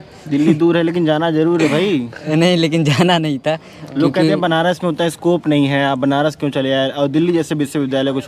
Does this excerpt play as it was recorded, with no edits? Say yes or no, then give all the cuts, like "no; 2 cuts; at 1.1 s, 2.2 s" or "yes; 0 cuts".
yes; 0 cuts